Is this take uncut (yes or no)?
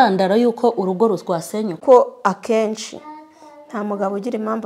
no